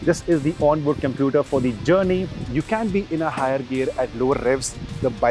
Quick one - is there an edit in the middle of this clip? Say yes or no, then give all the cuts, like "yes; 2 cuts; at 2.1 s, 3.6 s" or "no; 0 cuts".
yes; 1 cut; at 2.4 s